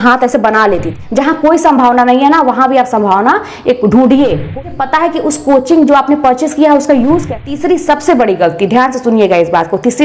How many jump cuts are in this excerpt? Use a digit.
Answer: 3